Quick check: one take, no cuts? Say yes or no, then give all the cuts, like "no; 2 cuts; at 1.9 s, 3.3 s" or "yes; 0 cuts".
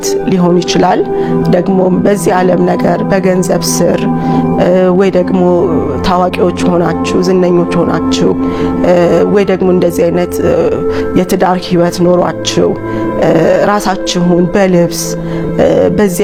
yes; 0 cuts